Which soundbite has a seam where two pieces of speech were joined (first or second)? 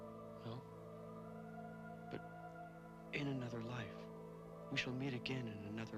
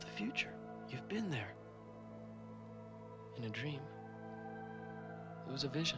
first